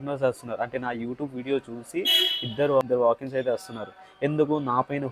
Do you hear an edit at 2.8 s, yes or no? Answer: yes